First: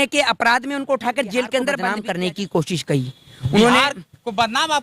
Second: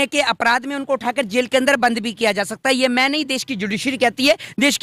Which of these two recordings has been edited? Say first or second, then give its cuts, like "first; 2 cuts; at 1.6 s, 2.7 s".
first; 1 cut; at 1.9 s